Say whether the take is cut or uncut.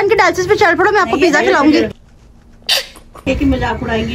uncut